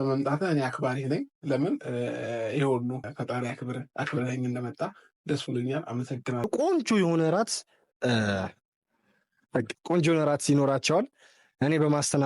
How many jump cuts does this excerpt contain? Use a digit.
1